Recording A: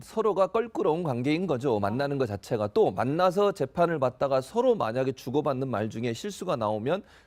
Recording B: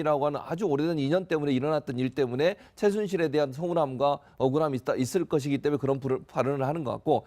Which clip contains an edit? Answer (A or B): B